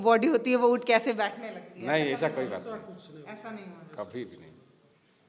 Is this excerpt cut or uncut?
uncut